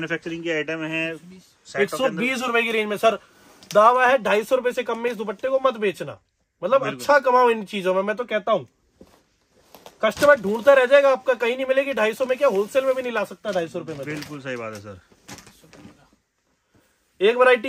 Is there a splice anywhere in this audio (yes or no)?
no